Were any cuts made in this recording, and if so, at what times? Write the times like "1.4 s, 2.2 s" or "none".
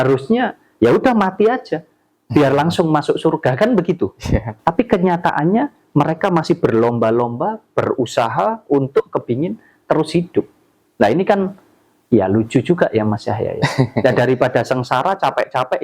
4.5 s